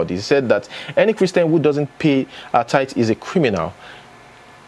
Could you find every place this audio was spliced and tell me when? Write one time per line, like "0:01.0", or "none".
none